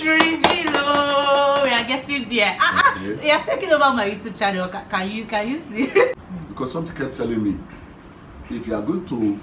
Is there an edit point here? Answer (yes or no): yes